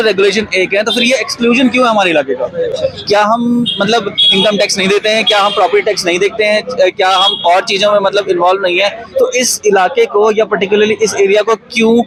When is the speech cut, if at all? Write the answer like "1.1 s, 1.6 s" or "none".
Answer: none

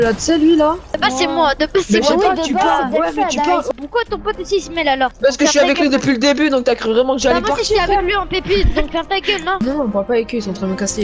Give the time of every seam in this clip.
0.9 s, 3.7 s, 5.1 s, 9.6 s

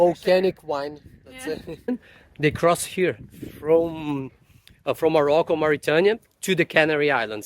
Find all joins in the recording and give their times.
1.9 s

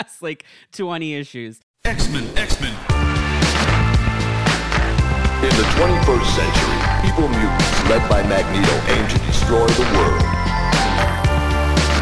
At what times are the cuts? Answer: 1.6 s

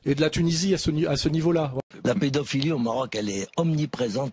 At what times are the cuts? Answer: 1.9 s

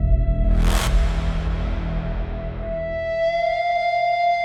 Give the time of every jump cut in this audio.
none

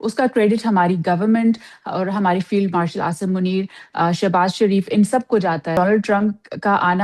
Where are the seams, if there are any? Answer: 5.8 s

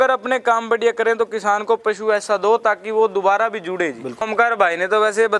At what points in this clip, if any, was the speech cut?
4.3 s

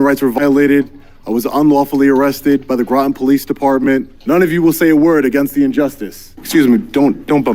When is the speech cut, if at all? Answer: 4.1 s, 6.4 s

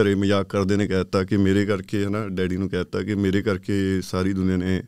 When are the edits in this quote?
none

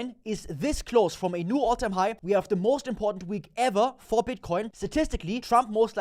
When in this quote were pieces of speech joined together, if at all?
2.2 s, 5.0 s

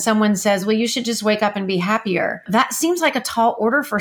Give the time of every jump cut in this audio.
2.5 s

